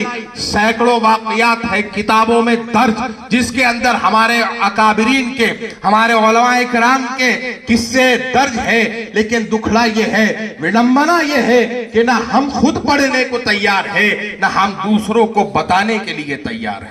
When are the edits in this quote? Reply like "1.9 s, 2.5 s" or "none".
none